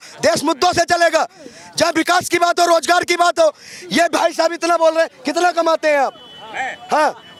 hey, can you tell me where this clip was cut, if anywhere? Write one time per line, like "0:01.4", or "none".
none

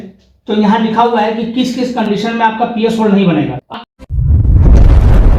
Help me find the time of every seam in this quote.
none

